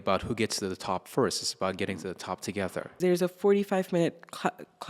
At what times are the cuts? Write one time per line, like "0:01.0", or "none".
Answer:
0:02.9